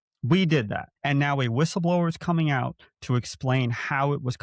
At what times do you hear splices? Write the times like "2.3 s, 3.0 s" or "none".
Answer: 0.9 s